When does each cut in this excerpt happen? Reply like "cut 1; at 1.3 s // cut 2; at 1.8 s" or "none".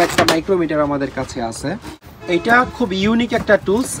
cut 1; at 2.2 s